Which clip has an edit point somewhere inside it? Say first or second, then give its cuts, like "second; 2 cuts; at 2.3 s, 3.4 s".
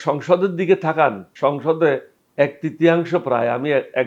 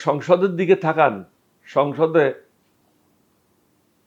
first; 2 cuts; at 1.3 s, 2.2 s